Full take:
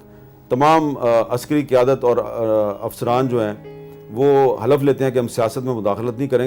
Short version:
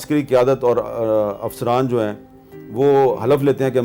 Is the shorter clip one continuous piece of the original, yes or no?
yes